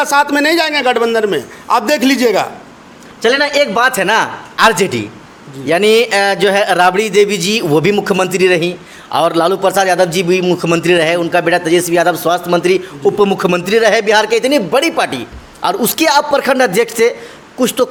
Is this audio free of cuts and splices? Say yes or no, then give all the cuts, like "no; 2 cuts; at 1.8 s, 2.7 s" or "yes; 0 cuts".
yes; 0 cuts